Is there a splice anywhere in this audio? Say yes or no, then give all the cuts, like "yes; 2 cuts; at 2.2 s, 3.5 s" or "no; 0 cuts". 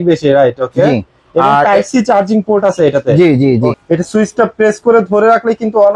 yes; 1 cut; at 3.7 s